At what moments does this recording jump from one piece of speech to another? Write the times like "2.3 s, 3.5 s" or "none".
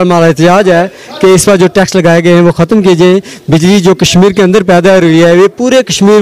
none